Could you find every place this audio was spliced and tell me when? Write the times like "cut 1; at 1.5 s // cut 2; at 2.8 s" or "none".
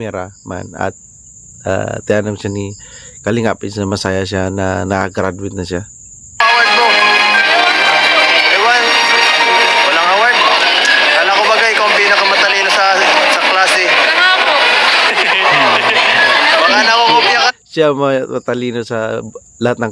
none